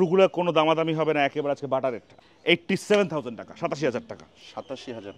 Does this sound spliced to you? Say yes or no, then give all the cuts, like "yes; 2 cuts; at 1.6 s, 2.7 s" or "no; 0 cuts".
yes; 1 cut; at 2.3 s